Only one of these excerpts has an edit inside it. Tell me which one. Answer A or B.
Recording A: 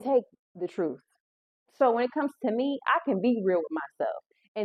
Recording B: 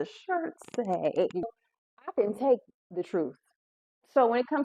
B